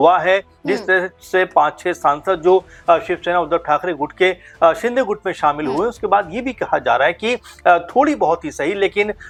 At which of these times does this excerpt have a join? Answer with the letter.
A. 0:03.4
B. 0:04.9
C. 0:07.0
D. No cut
D